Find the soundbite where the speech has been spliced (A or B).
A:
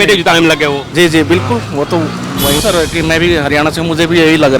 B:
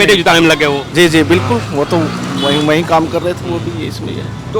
A